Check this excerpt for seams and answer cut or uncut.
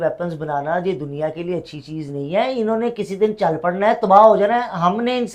uncut